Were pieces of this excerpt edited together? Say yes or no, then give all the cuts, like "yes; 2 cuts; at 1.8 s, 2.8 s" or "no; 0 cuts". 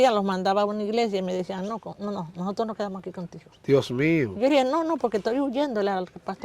no; 0 cuts